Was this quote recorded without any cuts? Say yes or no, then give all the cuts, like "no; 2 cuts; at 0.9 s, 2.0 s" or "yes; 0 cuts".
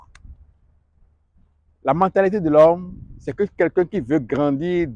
yes; 0 cuts